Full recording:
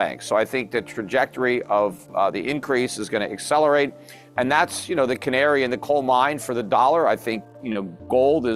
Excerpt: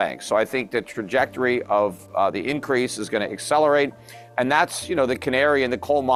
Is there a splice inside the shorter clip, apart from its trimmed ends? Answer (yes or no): no